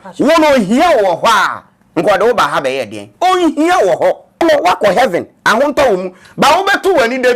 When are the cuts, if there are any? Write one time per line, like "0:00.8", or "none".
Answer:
0:04.4